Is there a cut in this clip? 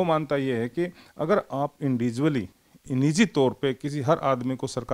no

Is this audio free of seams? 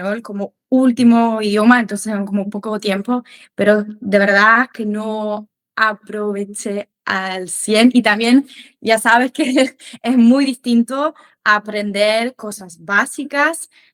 yes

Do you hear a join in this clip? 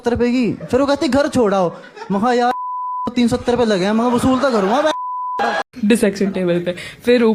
yes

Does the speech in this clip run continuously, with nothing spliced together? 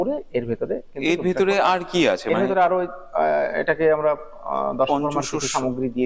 yes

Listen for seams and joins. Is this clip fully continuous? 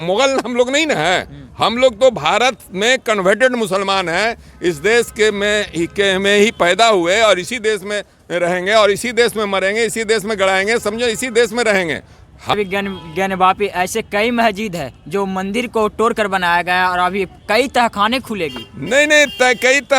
no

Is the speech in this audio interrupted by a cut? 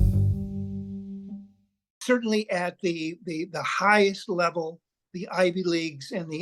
yes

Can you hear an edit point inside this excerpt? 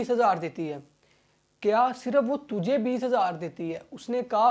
no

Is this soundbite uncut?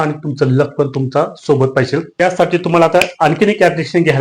no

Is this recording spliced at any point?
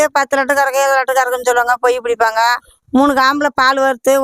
no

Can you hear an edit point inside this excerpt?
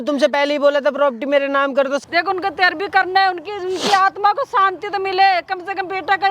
yes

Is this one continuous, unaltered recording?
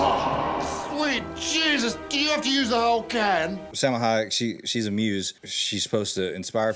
no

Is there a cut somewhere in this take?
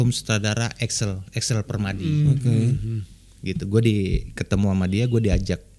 no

